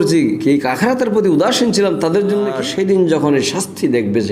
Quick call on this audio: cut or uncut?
cut